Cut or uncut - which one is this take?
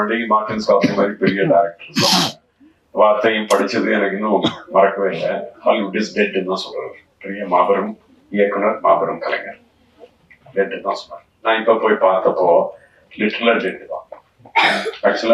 uncut